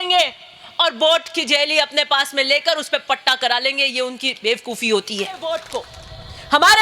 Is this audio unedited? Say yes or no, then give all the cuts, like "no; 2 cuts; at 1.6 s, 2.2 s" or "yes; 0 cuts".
no; 1 cut; at 5.4 s